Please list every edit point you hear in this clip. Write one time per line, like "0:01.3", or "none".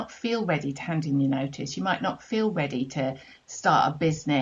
none